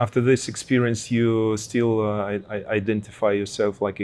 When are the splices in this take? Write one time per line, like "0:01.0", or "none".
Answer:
none